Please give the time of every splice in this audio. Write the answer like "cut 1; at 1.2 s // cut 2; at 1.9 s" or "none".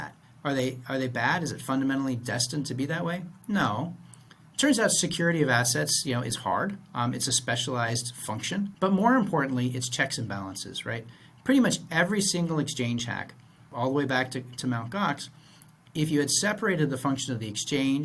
cut 1; at 8.7 s // cut 2; at 13.6 s